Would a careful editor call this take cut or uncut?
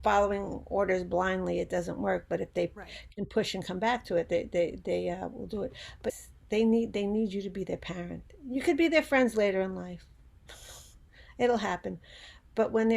cut